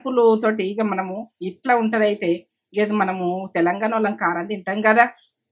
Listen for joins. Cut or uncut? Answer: uncut